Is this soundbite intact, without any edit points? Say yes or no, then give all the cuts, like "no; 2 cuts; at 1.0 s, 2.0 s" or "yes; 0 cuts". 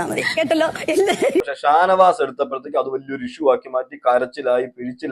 no; 1 cut; at 1.5 s